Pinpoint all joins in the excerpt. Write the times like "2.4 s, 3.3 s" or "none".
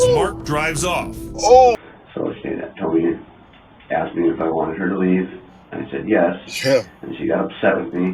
1.8 s